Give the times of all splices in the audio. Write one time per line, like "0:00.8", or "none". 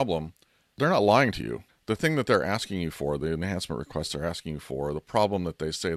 0:00.8
0:01.7